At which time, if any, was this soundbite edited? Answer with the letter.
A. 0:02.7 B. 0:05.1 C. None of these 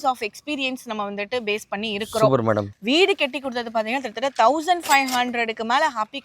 A